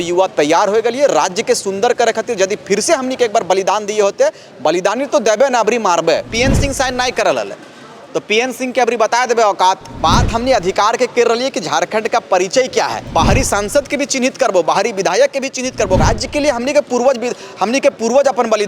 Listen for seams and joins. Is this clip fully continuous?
no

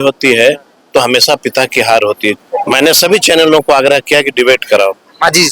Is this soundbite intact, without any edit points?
no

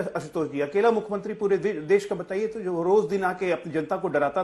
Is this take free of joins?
yes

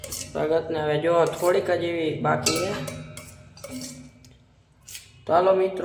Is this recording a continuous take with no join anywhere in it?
yes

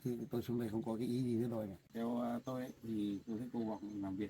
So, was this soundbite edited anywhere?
yes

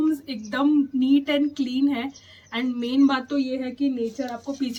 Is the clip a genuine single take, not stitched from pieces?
yes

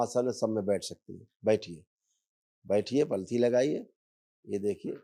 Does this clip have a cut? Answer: no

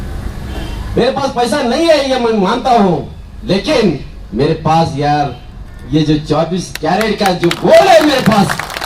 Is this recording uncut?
yes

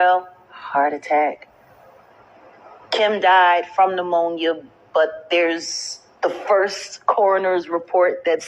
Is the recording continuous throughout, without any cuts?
yes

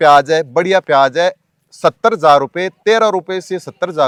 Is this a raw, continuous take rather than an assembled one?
yes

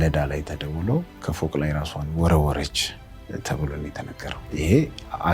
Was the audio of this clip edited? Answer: yes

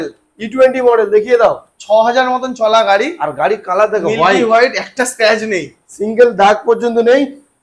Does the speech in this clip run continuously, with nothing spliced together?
yes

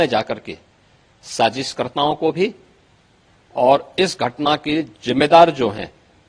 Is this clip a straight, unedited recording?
yes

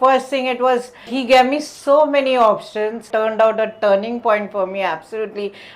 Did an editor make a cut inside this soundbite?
yes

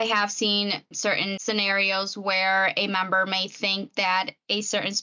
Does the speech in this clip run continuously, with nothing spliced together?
no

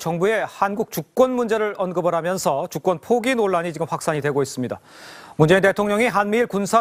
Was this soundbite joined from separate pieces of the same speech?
no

